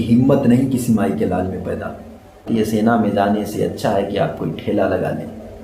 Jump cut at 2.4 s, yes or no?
yes